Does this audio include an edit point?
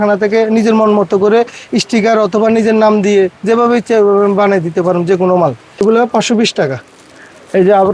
yes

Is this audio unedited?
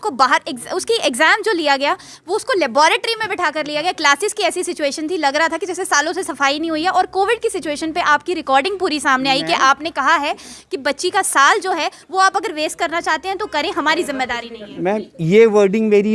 yes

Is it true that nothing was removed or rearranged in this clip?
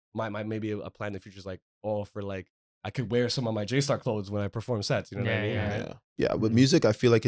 no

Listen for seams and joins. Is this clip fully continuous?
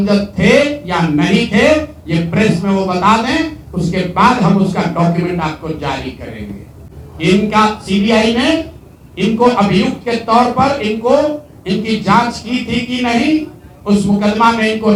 yes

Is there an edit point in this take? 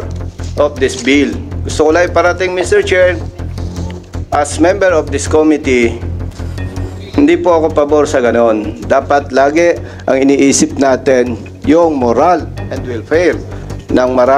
no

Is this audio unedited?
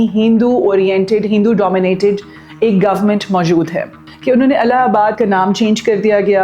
no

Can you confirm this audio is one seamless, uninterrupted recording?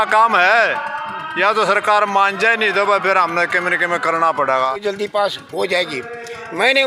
no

